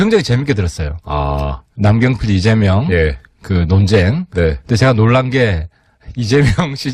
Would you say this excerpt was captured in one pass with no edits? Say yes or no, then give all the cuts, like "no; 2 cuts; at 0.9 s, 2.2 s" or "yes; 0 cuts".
yes; 0 cuts